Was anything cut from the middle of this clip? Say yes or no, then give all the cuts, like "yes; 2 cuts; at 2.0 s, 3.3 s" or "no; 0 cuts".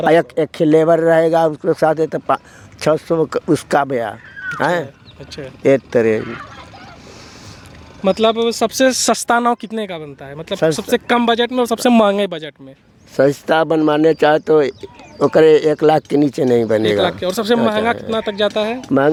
no; 0 cuts